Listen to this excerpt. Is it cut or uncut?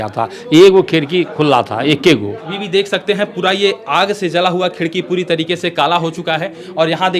cut